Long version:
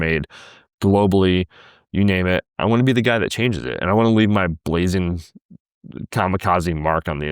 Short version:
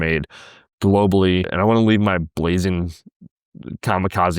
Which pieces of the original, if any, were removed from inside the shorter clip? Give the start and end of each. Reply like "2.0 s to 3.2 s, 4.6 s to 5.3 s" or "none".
1.5 s to 3.8 s